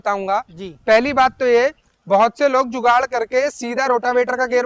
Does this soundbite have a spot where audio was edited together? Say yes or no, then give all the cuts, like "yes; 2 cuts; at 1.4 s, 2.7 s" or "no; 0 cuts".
no; 0 cuts